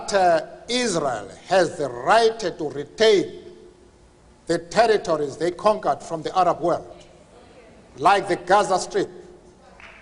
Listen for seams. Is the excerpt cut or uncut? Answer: uncut